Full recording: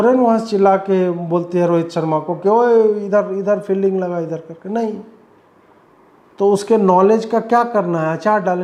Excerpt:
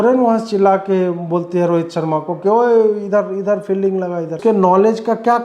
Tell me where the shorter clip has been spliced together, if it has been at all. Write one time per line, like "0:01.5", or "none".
0:04.4